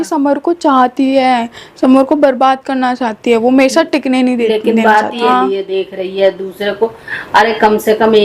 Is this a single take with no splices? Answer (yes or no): no